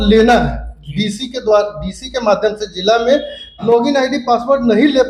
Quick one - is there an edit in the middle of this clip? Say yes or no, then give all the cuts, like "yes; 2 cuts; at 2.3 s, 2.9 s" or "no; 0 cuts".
yes; 1 cut; at 3.6 s